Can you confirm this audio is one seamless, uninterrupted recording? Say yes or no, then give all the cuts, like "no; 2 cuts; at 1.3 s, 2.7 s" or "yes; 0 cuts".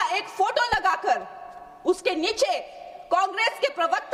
yes; 0 cuts